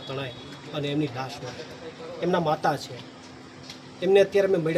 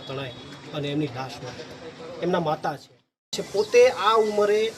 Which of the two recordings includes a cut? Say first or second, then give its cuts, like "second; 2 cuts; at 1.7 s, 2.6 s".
second; 1 cut; at 3.4 s